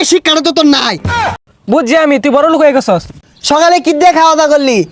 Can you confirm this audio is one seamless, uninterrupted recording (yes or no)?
no